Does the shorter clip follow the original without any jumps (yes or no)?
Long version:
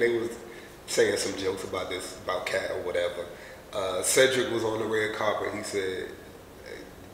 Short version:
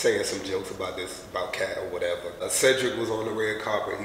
no